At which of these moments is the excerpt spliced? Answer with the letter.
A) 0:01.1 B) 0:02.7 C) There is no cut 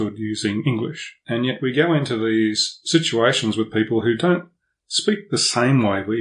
A